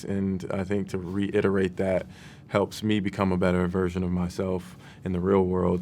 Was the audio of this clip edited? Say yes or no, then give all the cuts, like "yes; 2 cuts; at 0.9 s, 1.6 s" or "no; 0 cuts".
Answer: no; 0 cuts